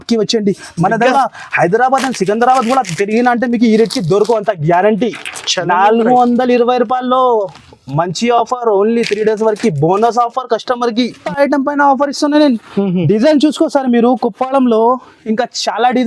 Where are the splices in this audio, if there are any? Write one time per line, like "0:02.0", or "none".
0:01.1
0:11.2